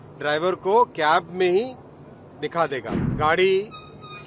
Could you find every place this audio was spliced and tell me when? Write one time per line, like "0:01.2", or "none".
0:02.9